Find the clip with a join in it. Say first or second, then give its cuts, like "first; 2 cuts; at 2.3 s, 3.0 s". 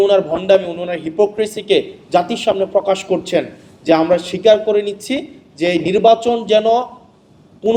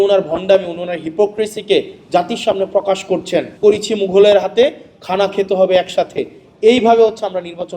second; 1 cut; at 3.5 s